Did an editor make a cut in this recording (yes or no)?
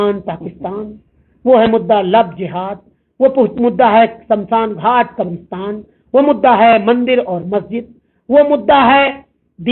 no